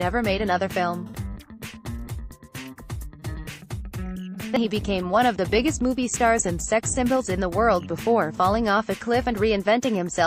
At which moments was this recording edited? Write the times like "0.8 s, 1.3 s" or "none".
1.6 s, 4.6 s